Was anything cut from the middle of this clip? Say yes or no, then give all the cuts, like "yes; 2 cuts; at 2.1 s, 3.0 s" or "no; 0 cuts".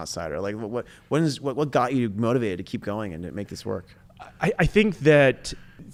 no; 0 cuts